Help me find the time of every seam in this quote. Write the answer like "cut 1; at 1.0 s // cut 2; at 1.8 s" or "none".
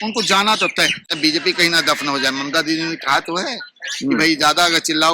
cut 1; at 1.0 s